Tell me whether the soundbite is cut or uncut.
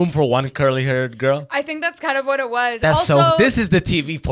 uncut